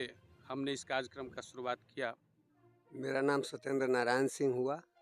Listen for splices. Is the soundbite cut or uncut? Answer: uncut